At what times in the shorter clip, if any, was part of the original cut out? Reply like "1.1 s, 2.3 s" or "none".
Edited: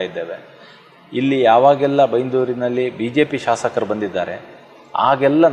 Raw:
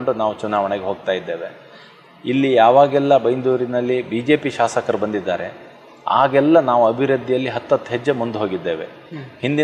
none